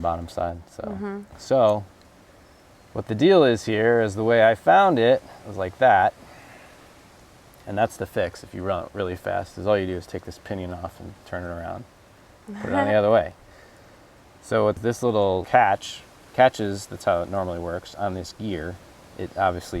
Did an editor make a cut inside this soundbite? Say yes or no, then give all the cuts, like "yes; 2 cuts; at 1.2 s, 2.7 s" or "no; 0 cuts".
yes; 1 cut; at 1.3 s